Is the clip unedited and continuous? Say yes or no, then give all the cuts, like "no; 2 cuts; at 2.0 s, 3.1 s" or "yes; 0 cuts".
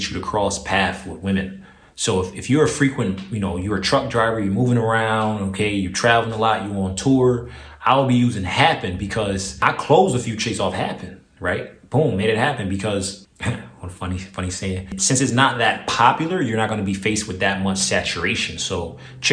no; 3 cuts; at 9.6 s, 13.2 s, 15.0 s